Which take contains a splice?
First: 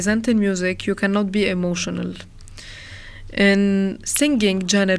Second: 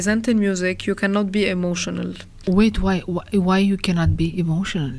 second; 1 cut; at 2.4 s

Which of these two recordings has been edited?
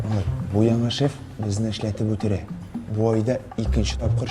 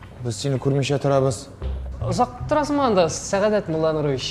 first; 1 cut; at 2.6 s

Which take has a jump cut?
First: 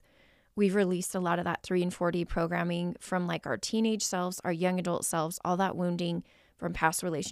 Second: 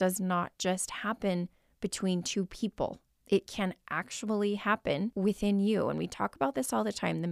second; 2 cuts; at 3.1 s, 5.1 s

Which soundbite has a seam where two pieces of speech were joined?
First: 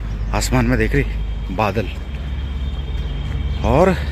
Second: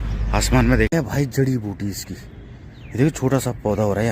second; 1 cut; at 0.9 s

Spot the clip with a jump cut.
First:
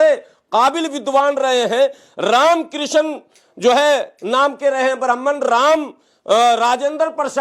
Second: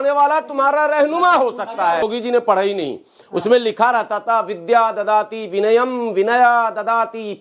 second; 1 cut; at 2.0 s

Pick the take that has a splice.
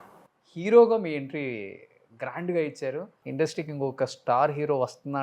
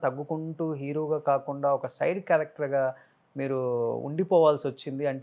first; 1 cut; at 3.2 s

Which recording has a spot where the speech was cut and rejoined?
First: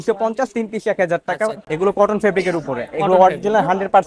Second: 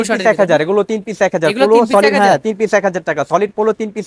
first; 1 cut; at 1.6 s

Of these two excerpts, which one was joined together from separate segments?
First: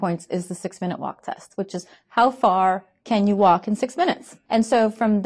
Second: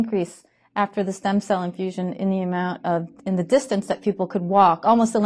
first; 1 cut; at 4.3 s

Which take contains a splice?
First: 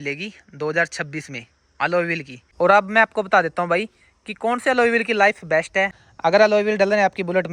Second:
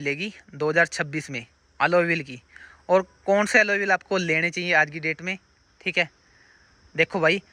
first; 2 cuts; at 2.4 s, 6.0 s

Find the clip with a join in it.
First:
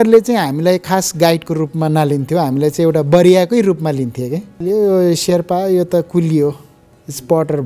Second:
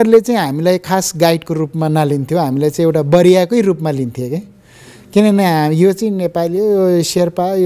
first; 1 cut; at 4.6 s

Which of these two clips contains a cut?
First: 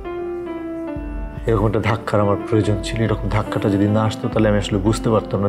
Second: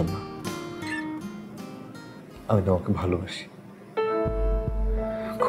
second; 1 cut; at 1.2 s

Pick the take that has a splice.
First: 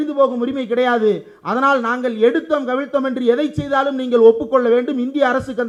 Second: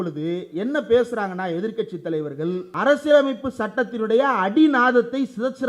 second; 1 cut; at 2.7 s

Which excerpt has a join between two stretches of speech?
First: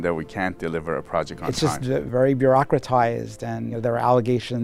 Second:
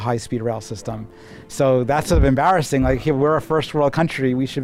first; 2 cuts; at 2.1 s, 3.8 s

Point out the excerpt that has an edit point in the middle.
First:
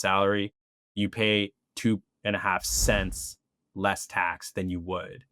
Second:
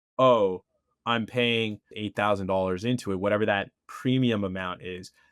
second; 1 cut; at 1.9 s

